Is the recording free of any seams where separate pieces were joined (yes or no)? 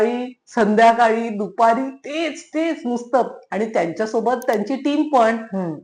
yes